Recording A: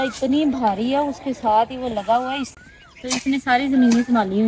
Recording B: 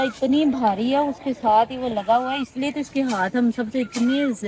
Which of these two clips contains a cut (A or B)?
A